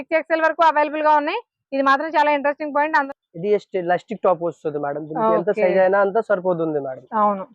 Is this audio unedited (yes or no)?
no